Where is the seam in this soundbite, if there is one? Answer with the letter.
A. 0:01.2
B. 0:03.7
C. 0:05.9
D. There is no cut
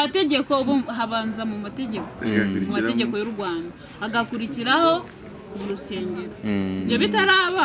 D